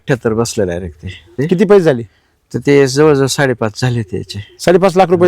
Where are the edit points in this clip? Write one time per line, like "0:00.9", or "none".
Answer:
0:01.4